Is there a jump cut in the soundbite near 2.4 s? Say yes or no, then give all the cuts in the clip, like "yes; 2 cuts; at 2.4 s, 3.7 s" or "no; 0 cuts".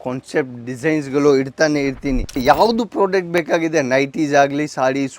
yes; 1 cut; at 2.4 s